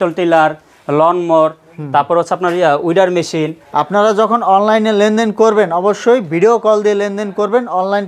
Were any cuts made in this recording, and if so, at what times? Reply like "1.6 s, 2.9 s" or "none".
3.7 s